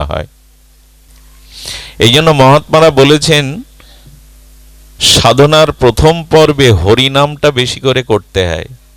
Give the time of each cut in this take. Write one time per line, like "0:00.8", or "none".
0:01.1